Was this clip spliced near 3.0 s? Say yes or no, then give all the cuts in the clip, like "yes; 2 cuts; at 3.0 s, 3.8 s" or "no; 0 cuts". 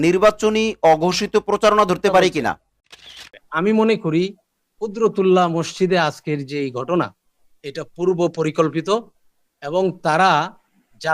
yes; 1 cut; at 3.0 s